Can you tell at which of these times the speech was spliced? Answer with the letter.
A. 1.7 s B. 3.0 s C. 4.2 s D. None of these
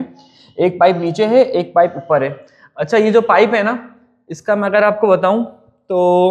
D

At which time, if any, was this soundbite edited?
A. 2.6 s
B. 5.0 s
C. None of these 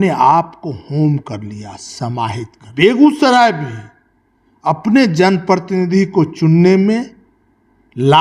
A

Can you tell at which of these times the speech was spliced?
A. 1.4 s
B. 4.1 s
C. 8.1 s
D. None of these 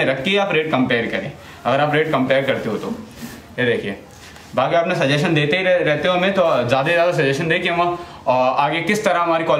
D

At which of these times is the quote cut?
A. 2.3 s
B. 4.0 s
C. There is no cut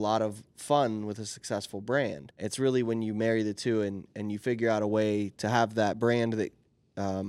A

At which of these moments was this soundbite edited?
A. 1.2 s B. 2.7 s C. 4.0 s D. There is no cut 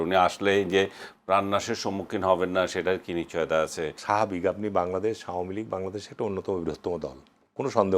C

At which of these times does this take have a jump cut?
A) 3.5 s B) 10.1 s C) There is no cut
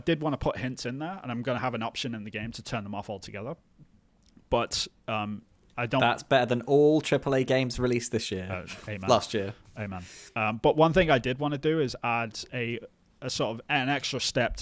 C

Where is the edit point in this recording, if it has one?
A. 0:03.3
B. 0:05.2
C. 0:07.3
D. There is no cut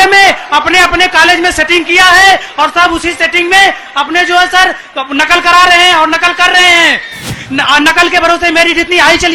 C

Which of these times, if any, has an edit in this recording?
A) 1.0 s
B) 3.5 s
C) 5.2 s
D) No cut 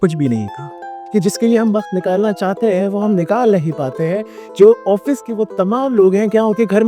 A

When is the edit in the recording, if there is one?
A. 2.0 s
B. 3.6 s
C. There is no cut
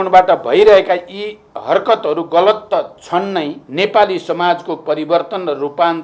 B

